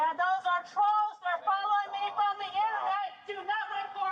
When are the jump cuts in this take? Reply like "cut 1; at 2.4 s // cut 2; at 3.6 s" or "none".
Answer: none

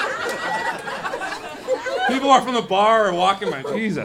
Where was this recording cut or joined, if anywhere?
none

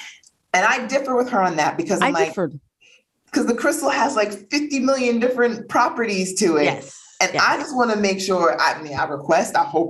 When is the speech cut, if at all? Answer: none

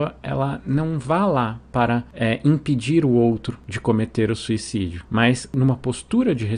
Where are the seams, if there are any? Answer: cut 1; at 5.5 s

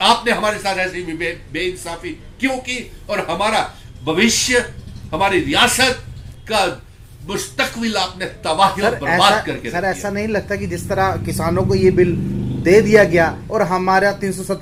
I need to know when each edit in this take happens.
none

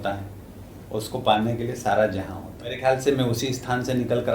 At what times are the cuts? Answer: cut 1; at 2.8 s

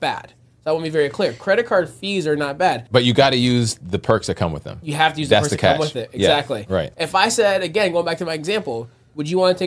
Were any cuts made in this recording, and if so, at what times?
cut 1; at 2.8 s // cut 2; at 6.9 s

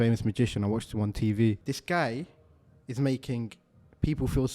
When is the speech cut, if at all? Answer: cut 1; at 1.7 s

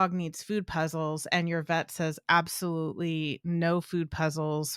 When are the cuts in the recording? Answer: none

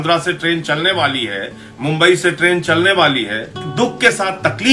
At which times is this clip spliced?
cut 1; at 3.6 s

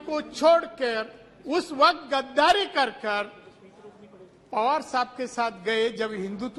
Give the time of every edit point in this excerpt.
none

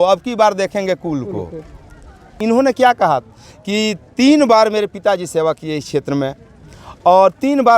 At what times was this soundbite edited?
cut 1; at 2.4 s

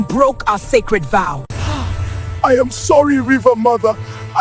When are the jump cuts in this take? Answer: cut 1; at 1.5 s

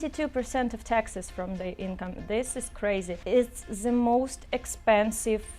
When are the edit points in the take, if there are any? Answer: cut 1; at 3.2 s

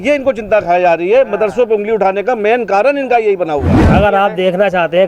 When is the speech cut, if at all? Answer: cut 1; at 3.8 s

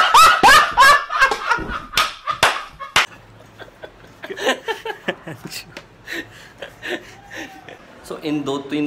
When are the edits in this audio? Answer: none

